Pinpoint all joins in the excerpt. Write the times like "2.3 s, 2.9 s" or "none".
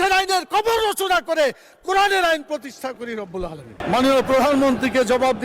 3.8 s